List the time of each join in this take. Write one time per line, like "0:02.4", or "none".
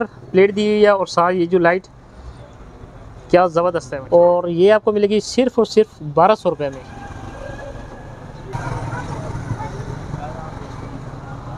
0:03.9
0:06.8